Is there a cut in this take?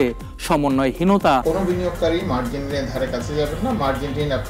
yes; 1 cut; at 1.4 s

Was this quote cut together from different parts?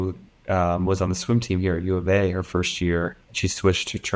yes; 1 cut; at 3.2 s

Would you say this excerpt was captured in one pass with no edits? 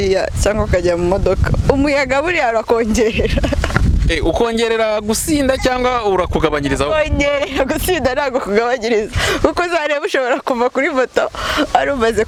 yes; 0 cuts

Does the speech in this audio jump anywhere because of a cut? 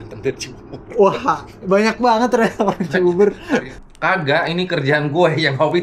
yes; 1 cut; at 3.8 s

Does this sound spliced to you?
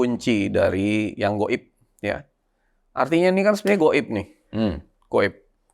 no; 0 cuts

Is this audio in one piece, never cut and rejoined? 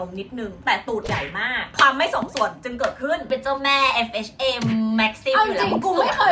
no; 2 cuts; at 1.7 s, 3.3 s

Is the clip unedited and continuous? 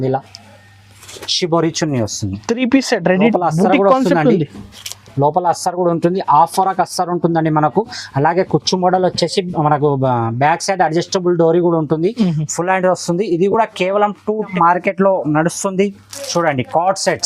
no; 2 cuts; at 3.3 s, 14.5 s

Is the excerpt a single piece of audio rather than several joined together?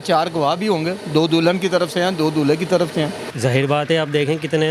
no; 1 cut; at 3.2 s

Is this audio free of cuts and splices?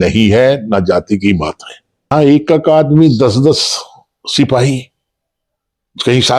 no; 1 cut; at 2.1 s

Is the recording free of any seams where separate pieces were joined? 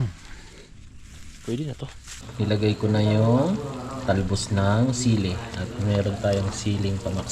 no; 1 cut; at 2.3 s

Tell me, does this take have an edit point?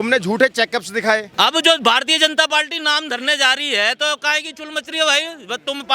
yes; 1 cut; at 1.3 s

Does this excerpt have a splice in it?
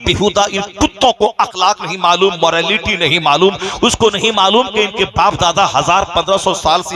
no; 0 cuts

